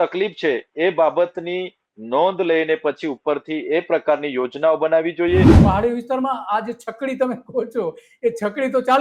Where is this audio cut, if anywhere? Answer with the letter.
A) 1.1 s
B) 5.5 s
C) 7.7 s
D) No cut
B